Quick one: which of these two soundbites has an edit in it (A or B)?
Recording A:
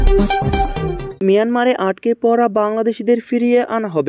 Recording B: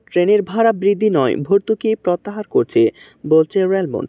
A